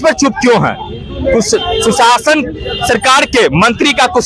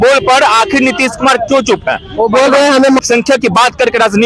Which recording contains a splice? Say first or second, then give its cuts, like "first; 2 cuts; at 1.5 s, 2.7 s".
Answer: second; 1 cut; at 3.0 s